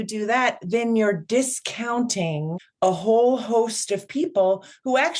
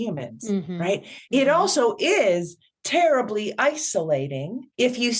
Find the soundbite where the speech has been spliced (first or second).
first